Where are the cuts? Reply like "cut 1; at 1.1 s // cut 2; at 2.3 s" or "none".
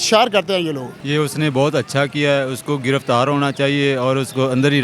cut 1; at 0.9 s